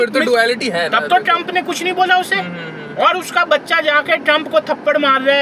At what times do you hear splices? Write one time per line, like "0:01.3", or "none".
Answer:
none